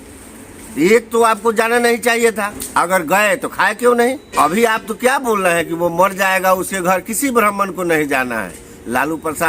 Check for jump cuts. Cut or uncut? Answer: cut